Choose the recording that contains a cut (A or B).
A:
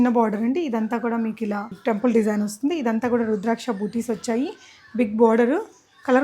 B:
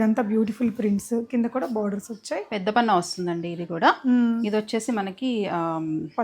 A